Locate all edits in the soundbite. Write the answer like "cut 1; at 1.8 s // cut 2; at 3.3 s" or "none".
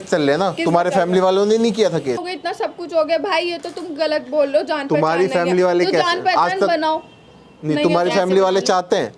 cut 1; at 2.2 s